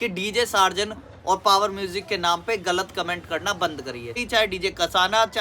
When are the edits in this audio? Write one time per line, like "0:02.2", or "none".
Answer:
0:04.2